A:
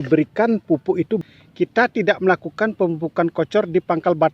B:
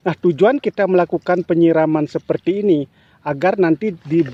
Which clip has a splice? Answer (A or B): A